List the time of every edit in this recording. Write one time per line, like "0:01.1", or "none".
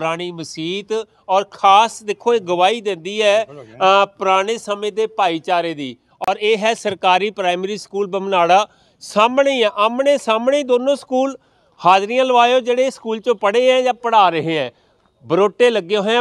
0:06.1